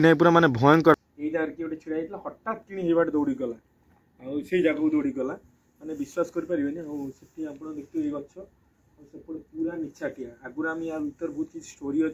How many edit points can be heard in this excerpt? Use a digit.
1